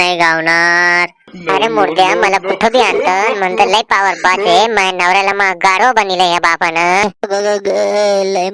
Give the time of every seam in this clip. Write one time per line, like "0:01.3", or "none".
0:07.0